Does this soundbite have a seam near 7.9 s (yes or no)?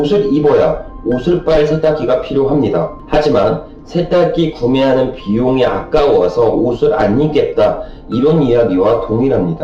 no